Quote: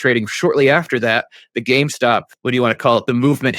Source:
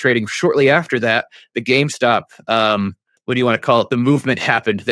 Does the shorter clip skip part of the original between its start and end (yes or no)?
yes